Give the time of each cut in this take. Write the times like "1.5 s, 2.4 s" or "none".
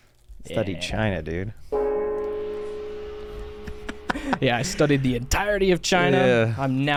none